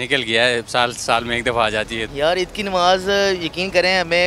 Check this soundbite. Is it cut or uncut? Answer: cut